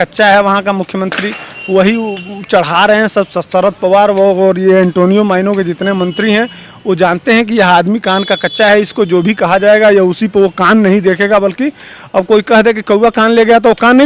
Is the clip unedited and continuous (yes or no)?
yes